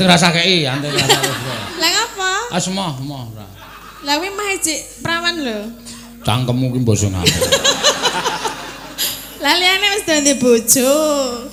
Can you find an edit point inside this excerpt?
no; 0 cuts

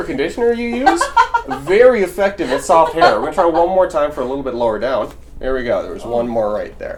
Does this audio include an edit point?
no; 0 cuts

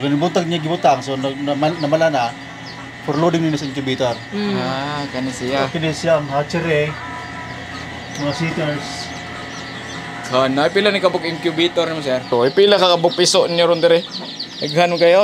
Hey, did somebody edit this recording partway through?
yes; 1 cut; at 12.3 s

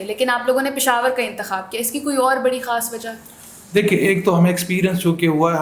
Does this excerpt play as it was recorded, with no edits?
yes; 0 cuts

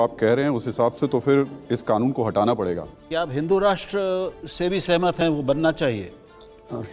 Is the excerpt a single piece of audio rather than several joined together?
yes; 0 cuts

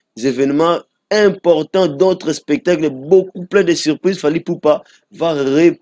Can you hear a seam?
no; 0 cuts

